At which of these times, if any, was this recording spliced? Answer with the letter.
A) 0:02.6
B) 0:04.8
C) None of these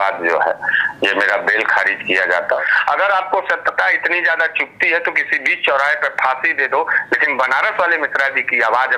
A